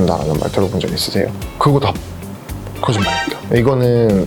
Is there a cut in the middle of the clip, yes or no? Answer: yes